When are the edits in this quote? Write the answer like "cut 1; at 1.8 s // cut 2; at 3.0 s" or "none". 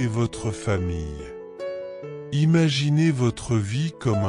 cut 1; at 1.3 s // cut 2; at 2.3 s